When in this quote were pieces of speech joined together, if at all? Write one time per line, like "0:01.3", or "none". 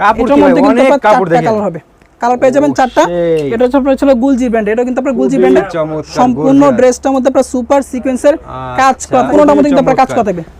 0:09.3